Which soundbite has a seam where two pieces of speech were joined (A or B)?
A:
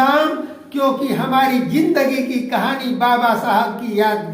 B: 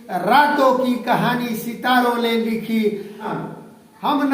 B